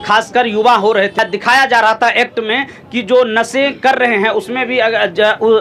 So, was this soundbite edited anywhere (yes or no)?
no